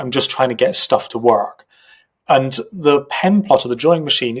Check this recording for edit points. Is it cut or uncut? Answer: uncut